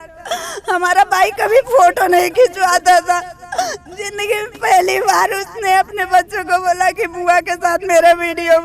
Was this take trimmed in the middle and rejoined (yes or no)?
no